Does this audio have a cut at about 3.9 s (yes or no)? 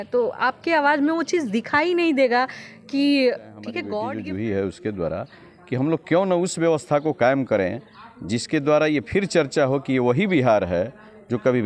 yes